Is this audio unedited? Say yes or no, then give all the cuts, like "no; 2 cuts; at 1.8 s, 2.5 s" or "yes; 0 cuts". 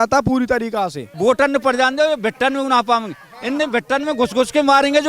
no; 1 cut; at 1.0 s